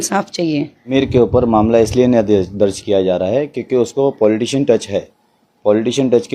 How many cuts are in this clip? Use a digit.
1